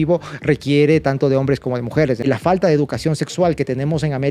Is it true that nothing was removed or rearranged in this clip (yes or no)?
no